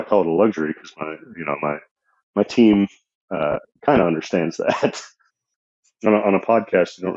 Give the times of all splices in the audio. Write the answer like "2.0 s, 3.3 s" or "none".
5.3 s